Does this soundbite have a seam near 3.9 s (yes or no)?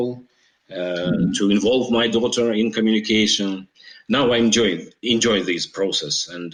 no